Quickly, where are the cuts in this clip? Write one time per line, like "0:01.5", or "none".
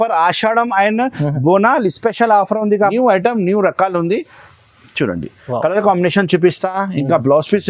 0:02.9

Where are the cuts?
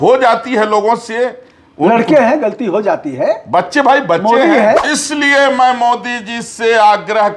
0:04.8

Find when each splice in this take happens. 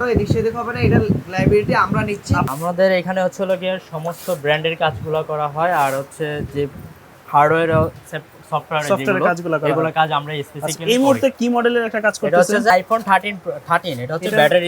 0:02.5
0:12.7

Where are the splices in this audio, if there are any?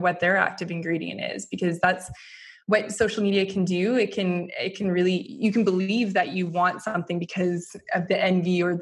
none

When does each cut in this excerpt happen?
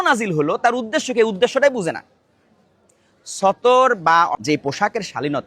0:04.4

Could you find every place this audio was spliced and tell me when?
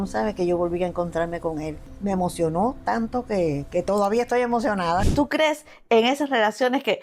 0:01.8
0:05.1

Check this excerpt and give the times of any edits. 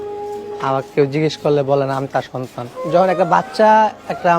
0:02.7

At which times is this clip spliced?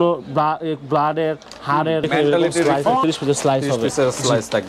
0:03.0

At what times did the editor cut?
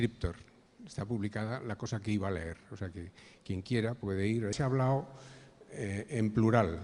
none

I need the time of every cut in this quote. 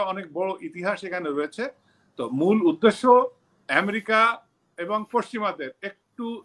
none

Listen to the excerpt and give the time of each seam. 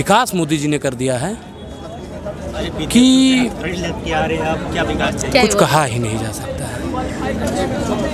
none

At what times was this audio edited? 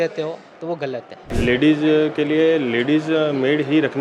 0:01.2

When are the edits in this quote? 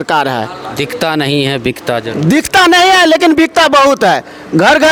none

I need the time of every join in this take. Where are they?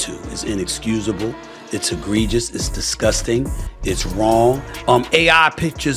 0:04.7

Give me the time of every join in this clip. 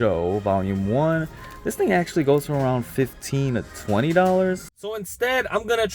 0:01.4
0:04.7

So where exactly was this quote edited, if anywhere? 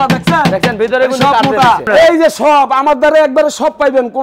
0:01.9

